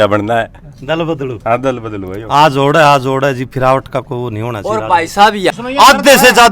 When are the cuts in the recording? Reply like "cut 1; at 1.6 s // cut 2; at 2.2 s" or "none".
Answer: cut 1; at 5.5 s